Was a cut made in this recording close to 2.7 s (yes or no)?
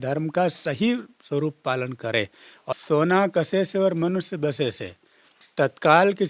yes